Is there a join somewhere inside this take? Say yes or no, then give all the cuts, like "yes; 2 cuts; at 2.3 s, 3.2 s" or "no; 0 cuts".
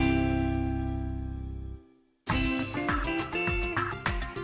yes; 1 cut; at 3.4 s